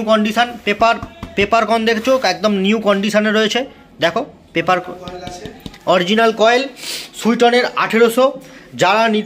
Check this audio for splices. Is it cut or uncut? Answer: uncut